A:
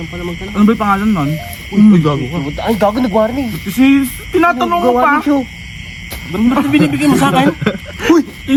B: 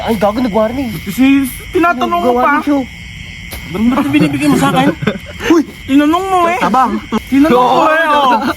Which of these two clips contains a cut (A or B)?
B